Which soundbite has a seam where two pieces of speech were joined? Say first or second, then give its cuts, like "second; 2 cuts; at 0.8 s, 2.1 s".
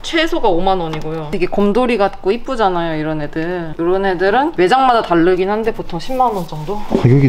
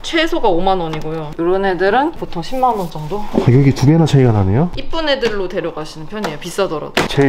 second; 3 cuts; at 1.3 s, 2.2 s, 4.8 s